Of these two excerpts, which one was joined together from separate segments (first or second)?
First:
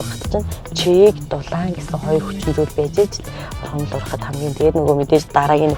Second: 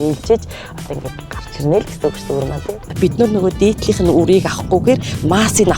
second